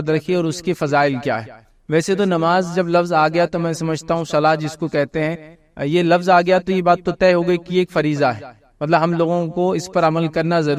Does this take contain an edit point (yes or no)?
no